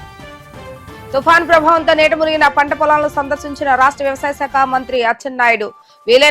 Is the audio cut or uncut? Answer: cut